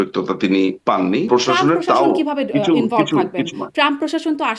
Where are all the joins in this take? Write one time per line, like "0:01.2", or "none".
0:01.3